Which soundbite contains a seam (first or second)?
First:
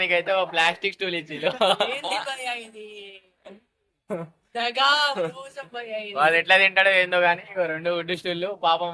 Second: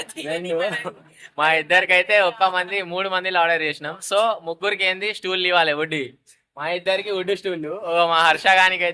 first